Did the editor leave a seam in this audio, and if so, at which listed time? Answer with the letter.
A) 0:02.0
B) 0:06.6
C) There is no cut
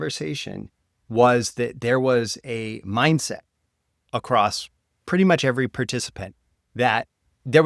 C